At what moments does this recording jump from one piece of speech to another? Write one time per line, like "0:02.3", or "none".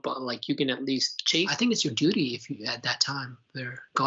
0:01.5